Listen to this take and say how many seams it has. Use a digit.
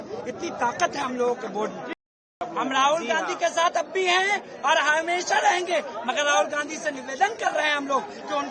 1